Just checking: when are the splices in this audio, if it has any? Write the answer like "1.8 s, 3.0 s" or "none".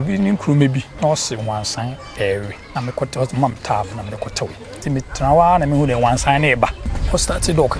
0.9 s, 2.6 s, 4.8 s, 6.9 s